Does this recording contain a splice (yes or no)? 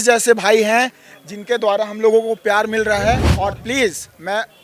yes